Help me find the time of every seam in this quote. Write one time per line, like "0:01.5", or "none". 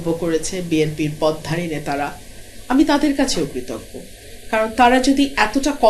none